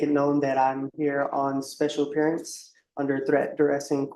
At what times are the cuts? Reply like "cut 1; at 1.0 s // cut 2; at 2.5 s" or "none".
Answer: none